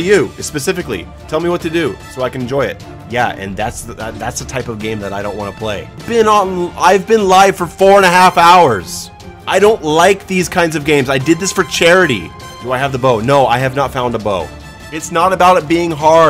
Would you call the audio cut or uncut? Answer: cut